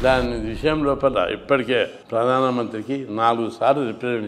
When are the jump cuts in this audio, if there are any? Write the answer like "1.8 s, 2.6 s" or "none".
2.0 s